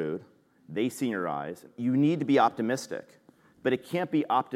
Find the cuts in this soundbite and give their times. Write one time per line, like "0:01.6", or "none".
0:01.7